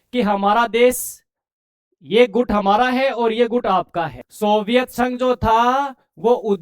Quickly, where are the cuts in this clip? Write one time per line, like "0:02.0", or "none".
0:04.2